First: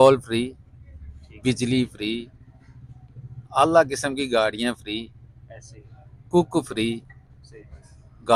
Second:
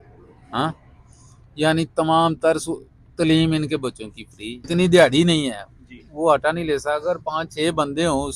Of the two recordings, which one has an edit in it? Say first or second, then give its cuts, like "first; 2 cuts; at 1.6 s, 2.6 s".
second; 1 cut; at 4.7 s